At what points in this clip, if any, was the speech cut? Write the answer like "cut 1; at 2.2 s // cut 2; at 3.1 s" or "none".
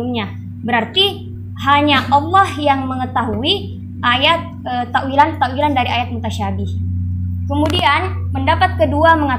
none

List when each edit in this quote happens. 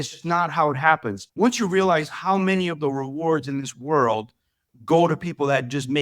cut 1; at 1.2 s

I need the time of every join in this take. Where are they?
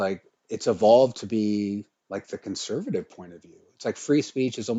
cut 1; at 2.0 s

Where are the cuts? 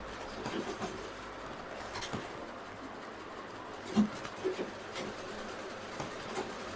none

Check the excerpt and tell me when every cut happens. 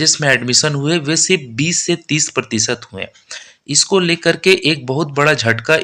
none

